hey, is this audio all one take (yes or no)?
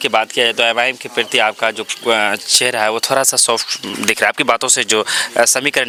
yes